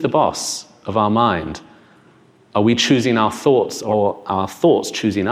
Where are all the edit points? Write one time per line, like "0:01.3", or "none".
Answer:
0:03.8